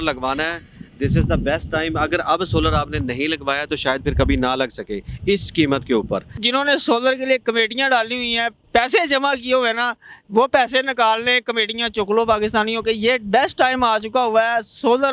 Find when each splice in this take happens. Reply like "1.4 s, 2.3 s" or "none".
6.4 s